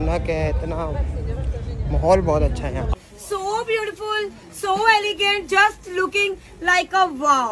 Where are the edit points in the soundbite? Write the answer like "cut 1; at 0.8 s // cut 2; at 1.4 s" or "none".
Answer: none